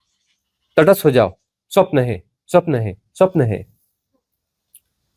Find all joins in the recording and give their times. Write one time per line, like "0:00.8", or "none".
none

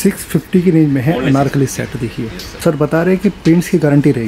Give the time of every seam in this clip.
0:02.4

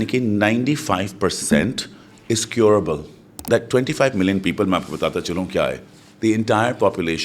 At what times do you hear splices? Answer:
0:03.5

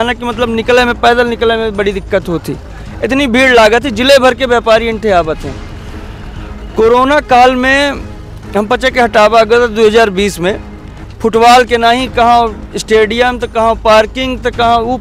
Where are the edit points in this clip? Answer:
none

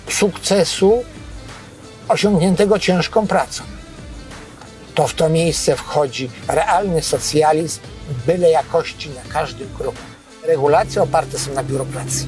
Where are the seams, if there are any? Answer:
0:10.5

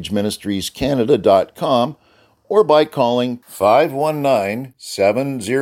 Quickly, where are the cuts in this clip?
none

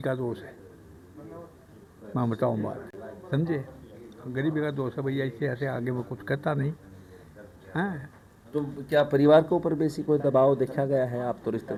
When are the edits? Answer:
none

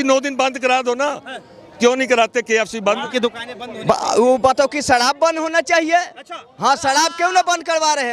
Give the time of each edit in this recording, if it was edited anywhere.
0:03.0

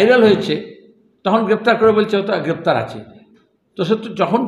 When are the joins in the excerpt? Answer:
none

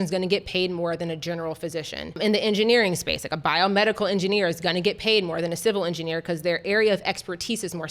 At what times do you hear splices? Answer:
0:02.2

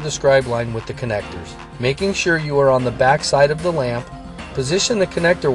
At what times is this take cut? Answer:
0:01.7

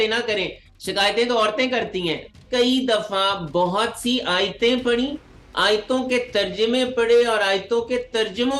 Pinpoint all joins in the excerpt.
0:02.4

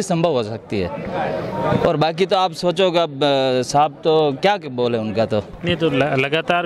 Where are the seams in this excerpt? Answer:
none

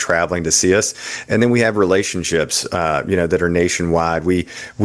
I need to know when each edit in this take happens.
none

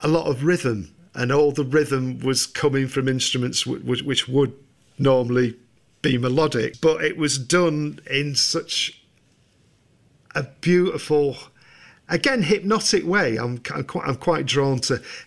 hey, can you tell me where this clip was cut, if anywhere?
0:06.7

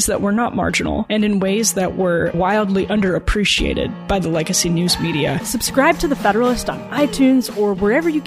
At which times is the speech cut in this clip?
0:05.4

